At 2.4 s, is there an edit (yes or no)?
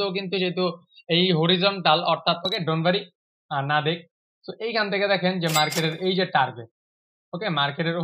yes